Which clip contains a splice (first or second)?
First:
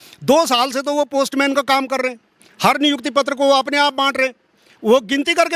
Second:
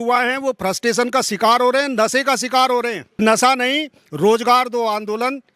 second